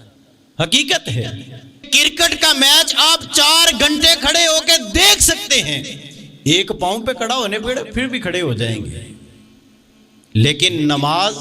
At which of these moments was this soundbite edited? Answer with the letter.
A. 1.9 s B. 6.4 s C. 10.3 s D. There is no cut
A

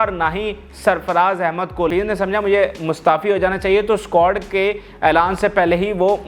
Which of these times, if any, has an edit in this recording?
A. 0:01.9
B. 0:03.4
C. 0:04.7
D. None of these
A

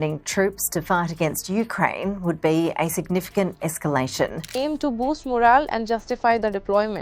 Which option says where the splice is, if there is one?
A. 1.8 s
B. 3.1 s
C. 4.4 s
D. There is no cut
C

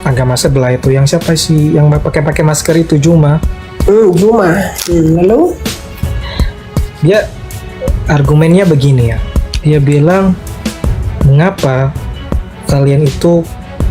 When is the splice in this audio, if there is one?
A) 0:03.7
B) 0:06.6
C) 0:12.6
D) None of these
D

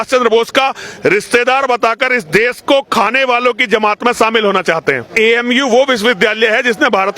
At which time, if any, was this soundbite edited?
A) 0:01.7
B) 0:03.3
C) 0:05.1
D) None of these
C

